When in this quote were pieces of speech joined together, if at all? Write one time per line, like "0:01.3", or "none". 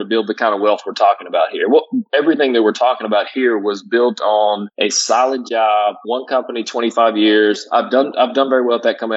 0:04.7

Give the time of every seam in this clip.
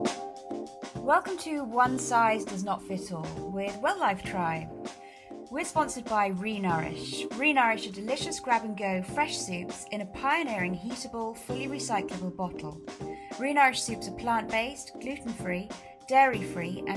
0:01.0

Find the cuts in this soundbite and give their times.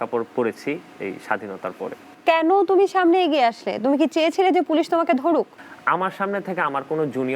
0:02.1
0:05.5

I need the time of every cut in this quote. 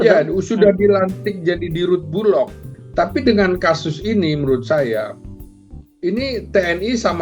0:02.6

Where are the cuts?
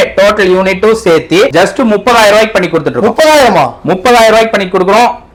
none

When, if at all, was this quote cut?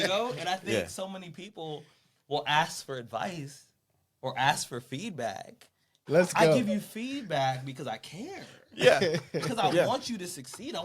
0:06.1

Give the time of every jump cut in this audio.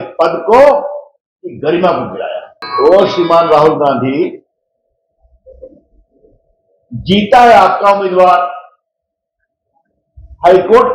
0:02.6

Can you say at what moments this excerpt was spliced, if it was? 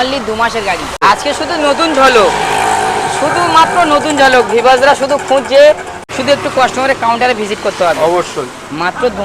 0:01.0
0:05.9

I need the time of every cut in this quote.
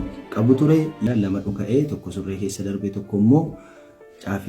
0:01.0

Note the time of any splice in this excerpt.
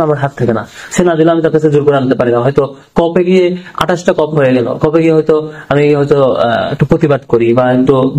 none

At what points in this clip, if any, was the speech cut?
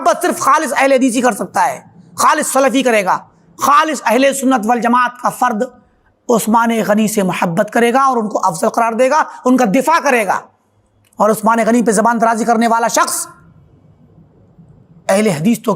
none

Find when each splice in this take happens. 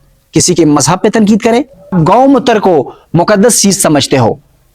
0:01.9

